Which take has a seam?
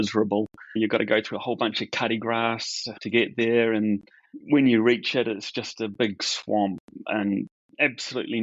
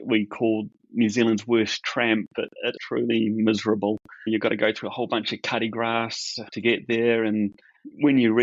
second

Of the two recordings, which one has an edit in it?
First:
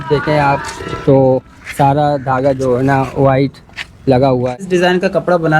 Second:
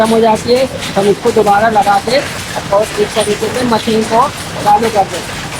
first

